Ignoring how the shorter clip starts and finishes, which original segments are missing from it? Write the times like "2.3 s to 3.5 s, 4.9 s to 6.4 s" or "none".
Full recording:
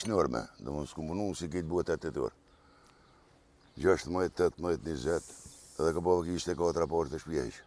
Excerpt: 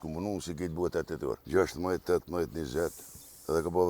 2.4 s to 3.7 s